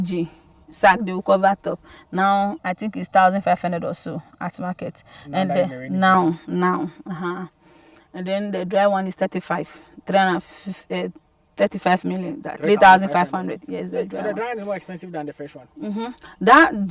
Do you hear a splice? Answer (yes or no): no